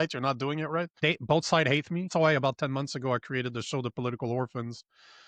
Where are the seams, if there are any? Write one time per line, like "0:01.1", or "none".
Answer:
0:00.9
0:02.1

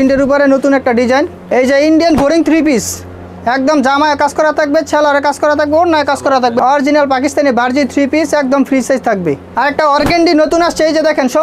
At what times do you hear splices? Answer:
0:01.4
0:06.6
0:09.5

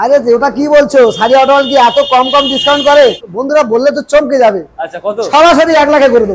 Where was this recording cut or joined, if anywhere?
0:03.2

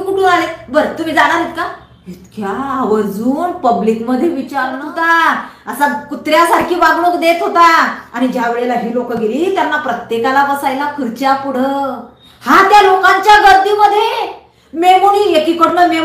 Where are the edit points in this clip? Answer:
0:04.7

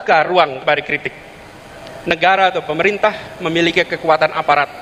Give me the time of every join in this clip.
none

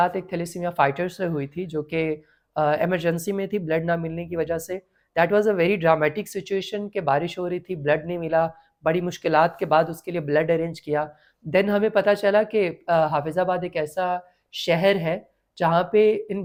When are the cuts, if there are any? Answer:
none

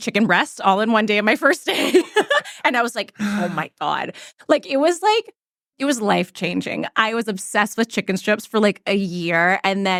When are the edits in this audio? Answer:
none

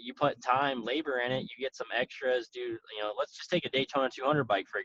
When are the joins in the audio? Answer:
none

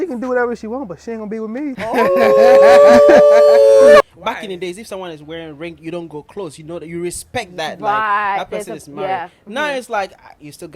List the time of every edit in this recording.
0:01.8
0:04.0

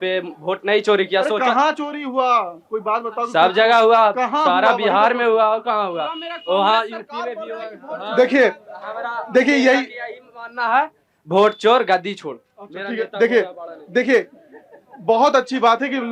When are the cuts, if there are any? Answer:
none

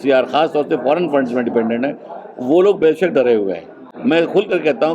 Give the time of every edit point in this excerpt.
none

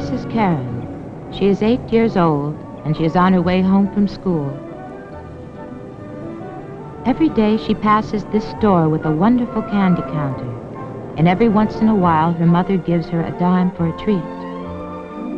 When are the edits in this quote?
0:12.5

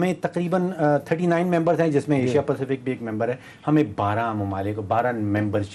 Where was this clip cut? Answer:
none

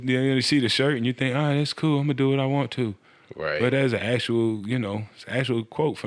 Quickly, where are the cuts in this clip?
none

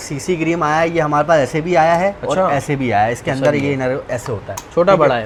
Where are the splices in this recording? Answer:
none

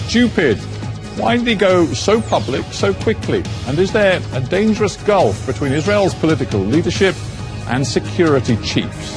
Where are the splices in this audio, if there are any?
0:03.4

